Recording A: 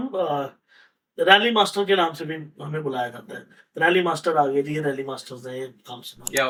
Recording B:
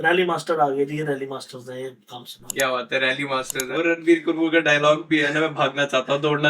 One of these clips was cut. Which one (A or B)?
B